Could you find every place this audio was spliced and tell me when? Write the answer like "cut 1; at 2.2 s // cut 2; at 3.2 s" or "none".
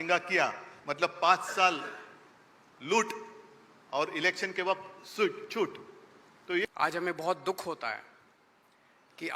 cut 1; at 6.6 s